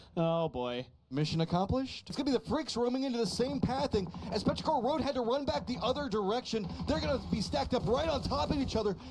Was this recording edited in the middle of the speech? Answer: yes; 1 cut; at 2.0 s

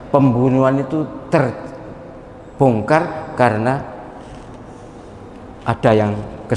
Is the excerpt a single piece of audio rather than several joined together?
yes; 0 cuts

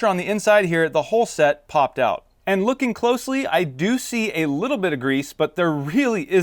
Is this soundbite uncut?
yes; 0 cuts

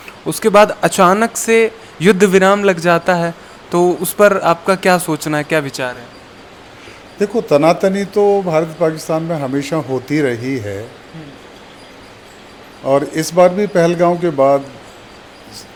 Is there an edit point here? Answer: no; 0 cuts

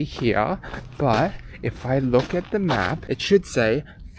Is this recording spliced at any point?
yes; 1 cut; at 3.0 s

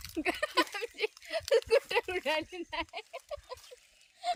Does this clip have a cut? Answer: no; 0 cuts

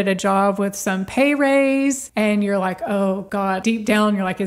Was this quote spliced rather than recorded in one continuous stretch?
yes; 2 cuts; at 2.1 s, 3.4 s

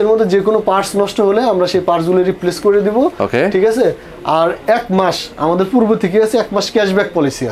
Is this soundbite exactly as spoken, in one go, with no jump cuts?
yes; 0 cuts

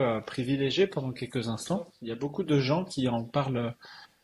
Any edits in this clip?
yes; 1 cut; at 2.0 s

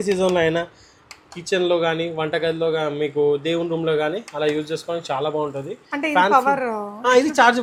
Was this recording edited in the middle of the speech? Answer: no; 0 cuts

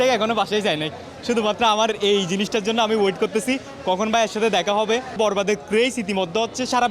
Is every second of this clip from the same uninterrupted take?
no; 1 cut; at 5.2 s

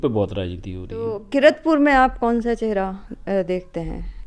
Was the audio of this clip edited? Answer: yes; 1 cut; at 1.2 s

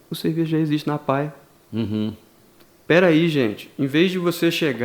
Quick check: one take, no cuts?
yes; 0 cuts

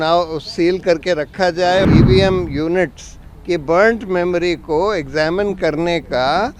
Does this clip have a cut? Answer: yes; 1 cut; at 1.8 s

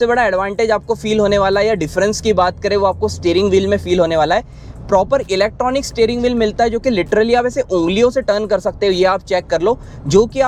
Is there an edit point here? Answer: no; 0 cuts

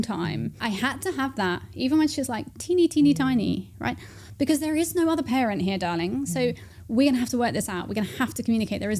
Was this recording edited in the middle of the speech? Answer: no; 0 cuts

